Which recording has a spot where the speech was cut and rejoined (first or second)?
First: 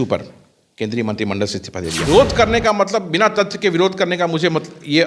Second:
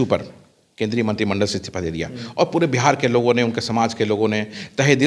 first